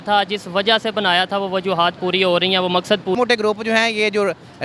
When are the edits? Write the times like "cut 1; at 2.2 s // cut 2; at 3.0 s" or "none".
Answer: cut 1; at 3.2 s